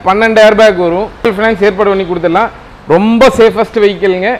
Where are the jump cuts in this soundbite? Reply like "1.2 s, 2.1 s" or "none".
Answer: 1.3 s